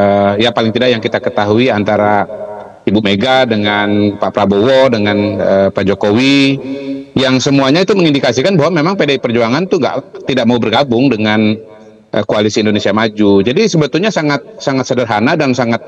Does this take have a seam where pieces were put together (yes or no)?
no